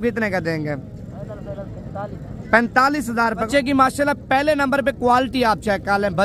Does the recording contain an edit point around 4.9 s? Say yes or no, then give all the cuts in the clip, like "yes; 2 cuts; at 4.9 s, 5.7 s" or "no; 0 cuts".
no; 1 cut; at 3.5 s